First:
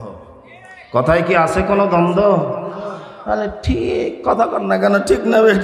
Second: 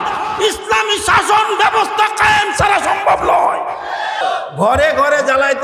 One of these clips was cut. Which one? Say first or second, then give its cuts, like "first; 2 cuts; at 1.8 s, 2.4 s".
second; 1 cut; at 4.2 s